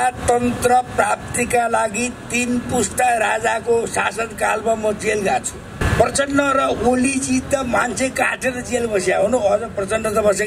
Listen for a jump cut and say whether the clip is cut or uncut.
cut